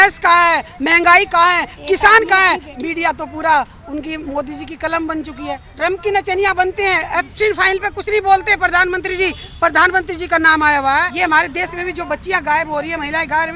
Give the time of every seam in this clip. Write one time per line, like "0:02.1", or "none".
0:02.7
0:05.7
0:11.1